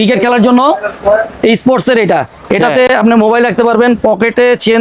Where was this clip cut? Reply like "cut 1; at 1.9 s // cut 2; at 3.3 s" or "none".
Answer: none